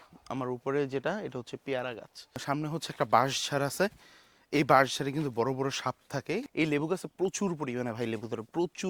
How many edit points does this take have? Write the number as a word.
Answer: two